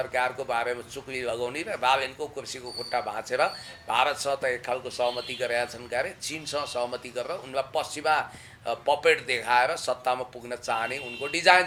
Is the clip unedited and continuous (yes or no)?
yes